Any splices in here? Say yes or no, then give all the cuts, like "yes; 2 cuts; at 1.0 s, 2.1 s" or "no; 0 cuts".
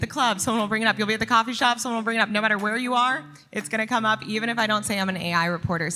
no; 0 cuts